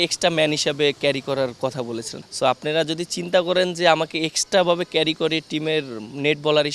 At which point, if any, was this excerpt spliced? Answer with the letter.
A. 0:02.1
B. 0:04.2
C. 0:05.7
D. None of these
A